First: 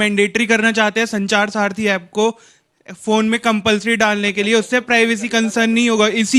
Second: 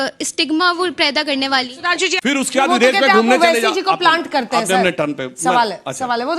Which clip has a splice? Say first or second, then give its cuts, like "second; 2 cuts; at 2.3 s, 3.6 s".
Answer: second; 1 cut; at 2.1 s